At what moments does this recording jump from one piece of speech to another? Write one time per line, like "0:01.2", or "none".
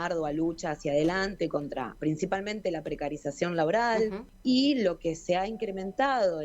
0:04.3